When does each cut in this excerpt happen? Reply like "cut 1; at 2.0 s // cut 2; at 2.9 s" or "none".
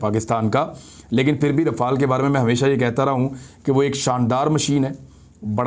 none